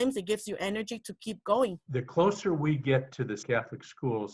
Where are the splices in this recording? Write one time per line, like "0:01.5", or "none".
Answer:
0:01.8
0:03.4